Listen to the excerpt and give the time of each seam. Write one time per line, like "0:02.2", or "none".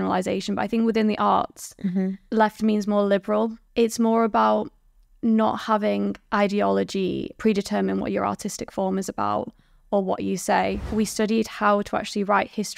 0:02.2
0:03.6
0:07.3
0:10.8